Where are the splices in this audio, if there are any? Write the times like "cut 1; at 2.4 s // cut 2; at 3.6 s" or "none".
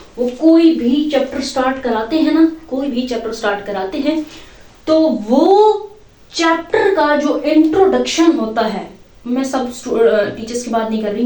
none